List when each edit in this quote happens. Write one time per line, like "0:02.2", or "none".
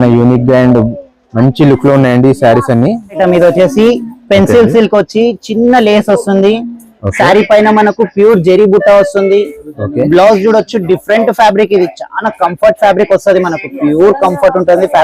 0:03.2